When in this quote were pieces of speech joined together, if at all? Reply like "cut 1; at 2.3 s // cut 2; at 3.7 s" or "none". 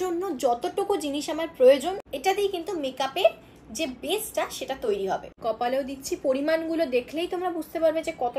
cut 1; at 2.0 s // cut 2; at 5.3 s